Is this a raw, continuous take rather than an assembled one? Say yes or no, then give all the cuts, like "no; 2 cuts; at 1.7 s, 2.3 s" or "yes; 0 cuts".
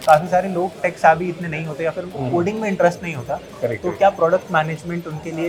yes; 0 cuts